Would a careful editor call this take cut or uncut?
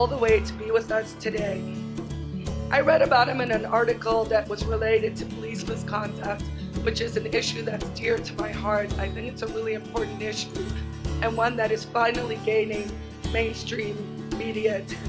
uncut